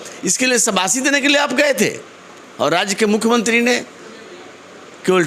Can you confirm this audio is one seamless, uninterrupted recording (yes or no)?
yes